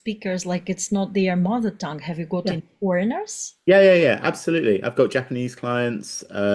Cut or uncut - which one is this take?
uncut